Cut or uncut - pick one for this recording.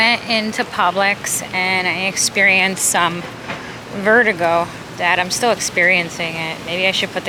uncut